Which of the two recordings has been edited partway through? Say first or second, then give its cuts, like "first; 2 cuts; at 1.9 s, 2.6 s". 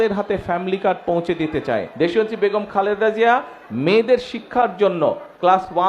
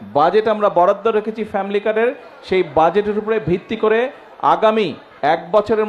first; 1 cut; at 1.9 s